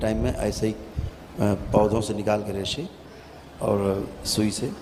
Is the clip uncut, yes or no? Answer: yes